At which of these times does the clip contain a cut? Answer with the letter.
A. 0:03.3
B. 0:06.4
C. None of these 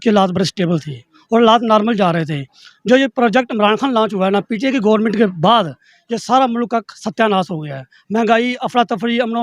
C